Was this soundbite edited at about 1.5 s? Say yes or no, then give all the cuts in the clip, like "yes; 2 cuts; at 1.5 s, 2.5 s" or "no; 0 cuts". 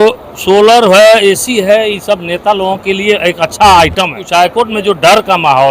no; 1 cut; at 4.2 s